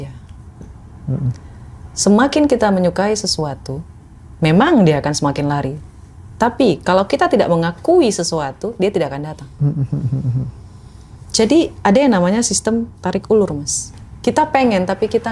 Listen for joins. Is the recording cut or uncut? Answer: uncut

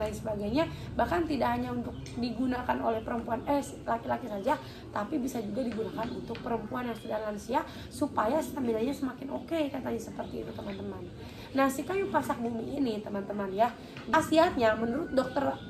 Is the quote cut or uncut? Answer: cut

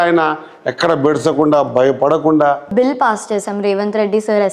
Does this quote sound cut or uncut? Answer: cut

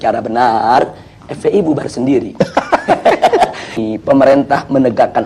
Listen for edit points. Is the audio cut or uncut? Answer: cut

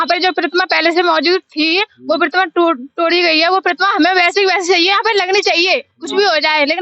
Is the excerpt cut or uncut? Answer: uncut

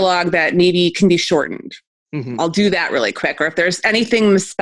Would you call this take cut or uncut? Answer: uncut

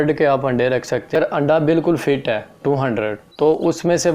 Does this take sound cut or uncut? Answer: cut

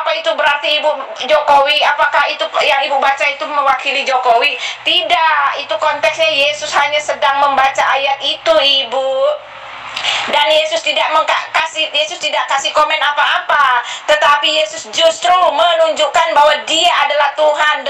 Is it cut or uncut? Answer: uncut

